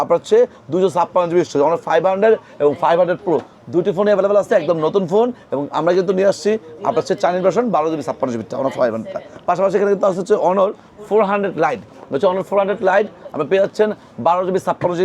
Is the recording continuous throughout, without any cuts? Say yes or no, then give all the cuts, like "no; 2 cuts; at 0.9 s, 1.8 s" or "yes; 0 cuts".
yes; 0 cuts